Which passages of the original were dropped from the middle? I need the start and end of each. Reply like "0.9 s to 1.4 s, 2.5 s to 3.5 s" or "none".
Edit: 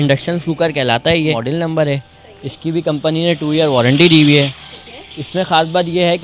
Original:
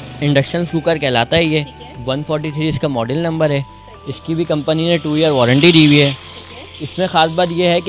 1.6 s to 3.0 s